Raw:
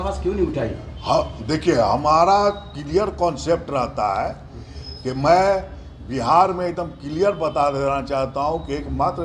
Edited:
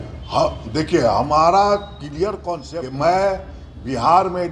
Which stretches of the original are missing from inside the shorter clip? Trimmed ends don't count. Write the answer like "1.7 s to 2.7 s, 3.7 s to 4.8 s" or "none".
3.3 s to 4.8 s